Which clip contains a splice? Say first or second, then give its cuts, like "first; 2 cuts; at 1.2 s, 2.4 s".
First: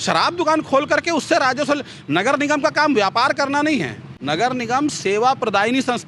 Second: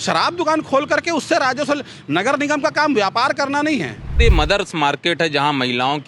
second; 1 cut; at 4.2 s